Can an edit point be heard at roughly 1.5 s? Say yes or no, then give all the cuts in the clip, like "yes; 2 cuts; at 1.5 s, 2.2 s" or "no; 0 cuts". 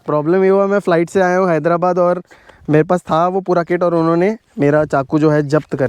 no; 0 cuts